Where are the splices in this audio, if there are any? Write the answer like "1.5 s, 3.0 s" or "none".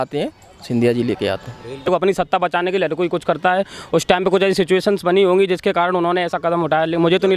1.9 s